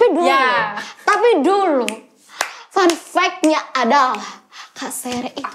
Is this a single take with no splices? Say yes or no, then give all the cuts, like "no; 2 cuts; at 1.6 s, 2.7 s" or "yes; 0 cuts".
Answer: yes; 0 cuts